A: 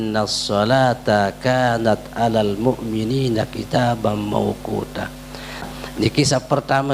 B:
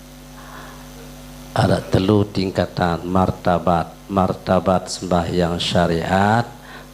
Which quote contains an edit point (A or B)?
A